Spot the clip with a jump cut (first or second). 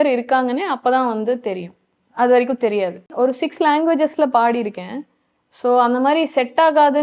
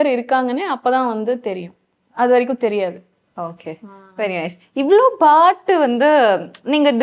first